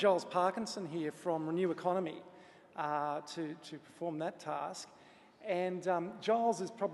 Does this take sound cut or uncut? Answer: uncut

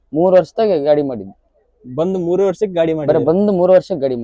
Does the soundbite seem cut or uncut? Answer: uncut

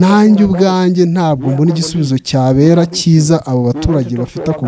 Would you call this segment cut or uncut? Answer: uncut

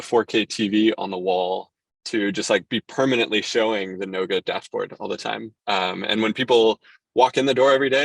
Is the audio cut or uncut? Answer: uncut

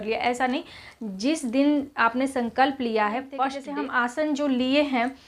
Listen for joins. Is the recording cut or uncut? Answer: cut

